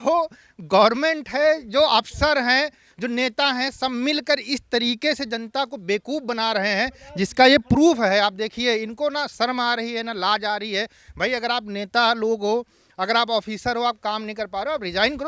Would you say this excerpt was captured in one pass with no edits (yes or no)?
yes